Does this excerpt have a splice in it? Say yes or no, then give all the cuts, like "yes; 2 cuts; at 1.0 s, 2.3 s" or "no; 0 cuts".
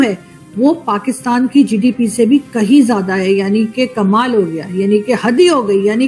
no; 0 cuts